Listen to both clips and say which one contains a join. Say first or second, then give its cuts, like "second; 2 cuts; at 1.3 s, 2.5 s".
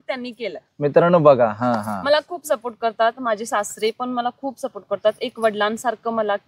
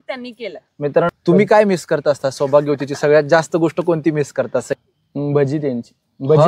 second; 2 cuts; at 1.1 s, 4.7 s